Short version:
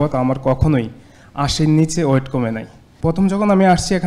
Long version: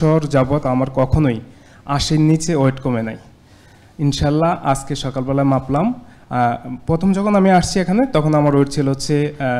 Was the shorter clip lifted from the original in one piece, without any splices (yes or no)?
no